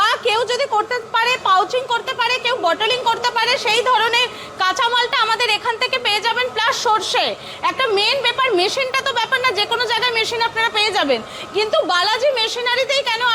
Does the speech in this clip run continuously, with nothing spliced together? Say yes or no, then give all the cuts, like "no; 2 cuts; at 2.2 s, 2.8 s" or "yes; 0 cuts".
yes; 0 cuts